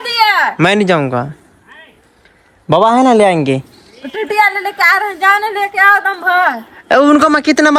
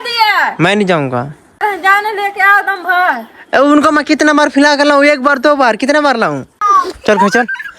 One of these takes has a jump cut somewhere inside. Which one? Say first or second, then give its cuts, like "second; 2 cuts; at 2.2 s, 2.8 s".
second; 2 cuts; at 1.6 s, 6.5 s